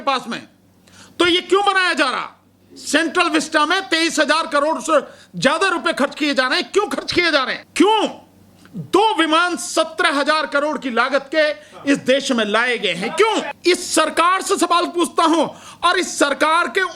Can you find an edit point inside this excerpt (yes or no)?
yes